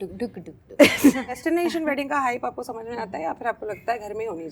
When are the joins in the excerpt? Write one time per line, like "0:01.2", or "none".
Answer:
0:01.4